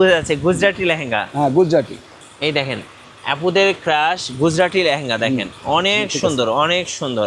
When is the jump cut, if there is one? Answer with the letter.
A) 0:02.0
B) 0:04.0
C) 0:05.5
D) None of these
D